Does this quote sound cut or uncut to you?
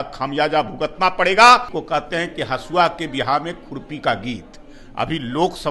cut